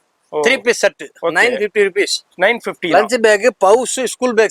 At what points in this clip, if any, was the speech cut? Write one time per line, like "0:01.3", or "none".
none